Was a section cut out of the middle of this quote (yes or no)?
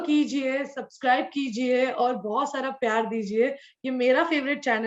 no